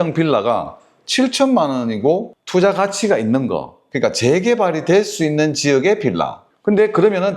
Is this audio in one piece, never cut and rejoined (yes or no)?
no